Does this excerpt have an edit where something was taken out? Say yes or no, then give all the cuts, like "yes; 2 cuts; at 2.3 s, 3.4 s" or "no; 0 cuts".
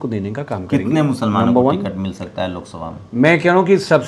no; 0 cuts